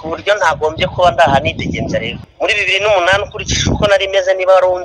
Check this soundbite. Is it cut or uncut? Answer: cut